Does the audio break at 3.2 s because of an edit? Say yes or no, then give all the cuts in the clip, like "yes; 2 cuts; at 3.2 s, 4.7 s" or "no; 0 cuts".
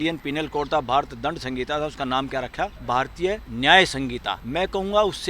yes; 2 cuts; at 3.2 s, 4.3 s